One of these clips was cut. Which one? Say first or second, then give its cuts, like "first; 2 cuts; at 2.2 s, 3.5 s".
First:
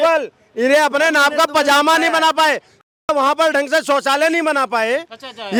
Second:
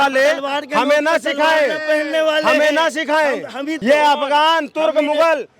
second; 1 cut; at 3.7 s